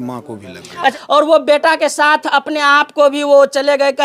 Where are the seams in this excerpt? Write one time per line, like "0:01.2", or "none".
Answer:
0:00.9